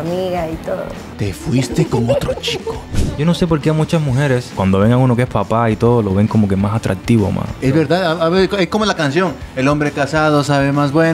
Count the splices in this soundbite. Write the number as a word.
four